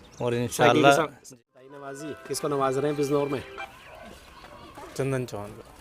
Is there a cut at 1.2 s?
yes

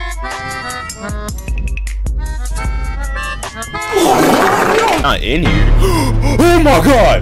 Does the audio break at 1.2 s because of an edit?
no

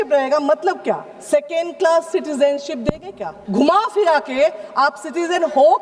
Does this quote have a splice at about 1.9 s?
no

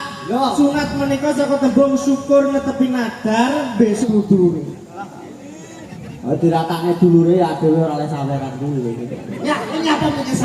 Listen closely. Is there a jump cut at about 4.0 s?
yes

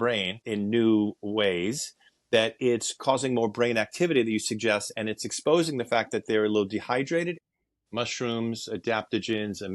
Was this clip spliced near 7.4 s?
yes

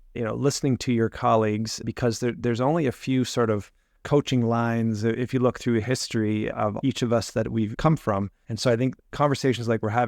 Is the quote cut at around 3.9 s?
no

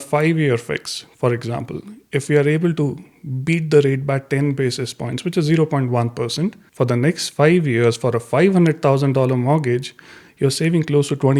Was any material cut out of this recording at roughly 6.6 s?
yes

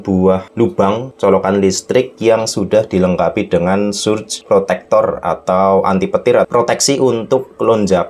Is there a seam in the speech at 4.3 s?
yes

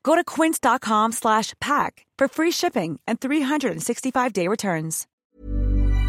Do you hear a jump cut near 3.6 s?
no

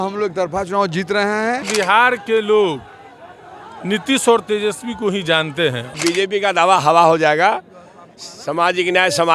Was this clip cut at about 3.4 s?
no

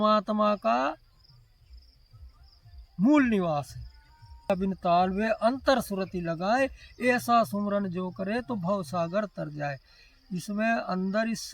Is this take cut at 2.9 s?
no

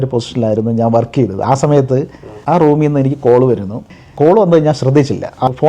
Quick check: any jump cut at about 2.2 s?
no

